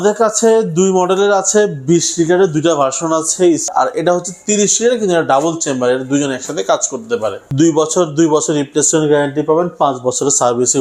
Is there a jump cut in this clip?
yes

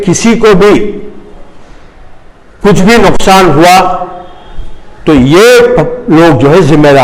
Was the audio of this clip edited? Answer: no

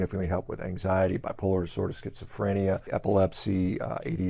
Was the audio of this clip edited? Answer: yes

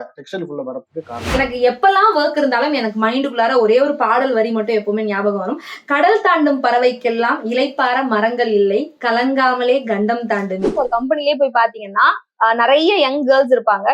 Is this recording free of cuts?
no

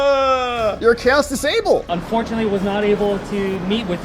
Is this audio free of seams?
no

